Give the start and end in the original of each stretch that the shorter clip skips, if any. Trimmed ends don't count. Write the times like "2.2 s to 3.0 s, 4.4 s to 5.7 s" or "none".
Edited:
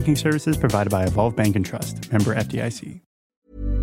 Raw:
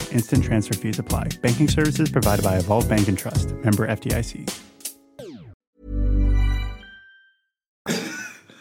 4.4 s to 5.2 s